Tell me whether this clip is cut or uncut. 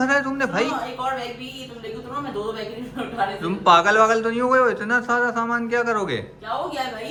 uncut